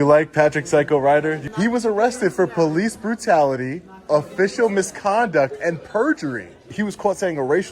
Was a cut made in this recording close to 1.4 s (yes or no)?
yes